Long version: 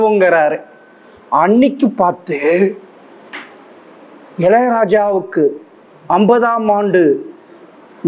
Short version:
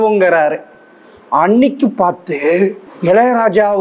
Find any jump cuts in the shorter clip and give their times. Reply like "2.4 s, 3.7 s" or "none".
2.9 s